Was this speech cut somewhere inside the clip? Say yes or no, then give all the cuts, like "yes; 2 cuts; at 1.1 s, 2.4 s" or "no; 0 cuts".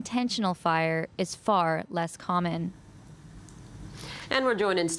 no; 0 cuts